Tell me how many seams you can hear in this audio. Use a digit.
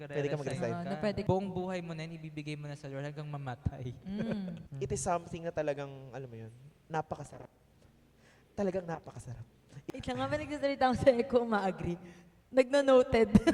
3